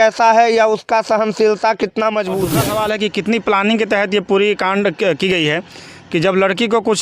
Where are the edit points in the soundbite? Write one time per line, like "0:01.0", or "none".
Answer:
0:02.5